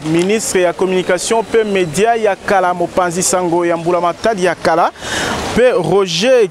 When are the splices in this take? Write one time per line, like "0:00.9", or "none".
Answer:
none